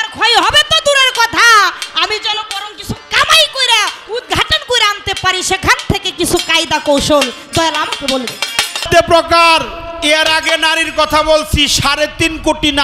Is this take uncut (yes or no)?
no